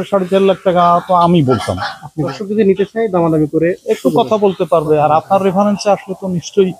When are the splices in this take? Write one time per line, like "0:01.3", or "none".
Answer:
0:02.3